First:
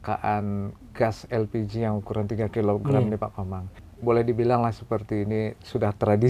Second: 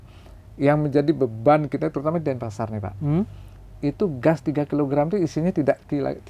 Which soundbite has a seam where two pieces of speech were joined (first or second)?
first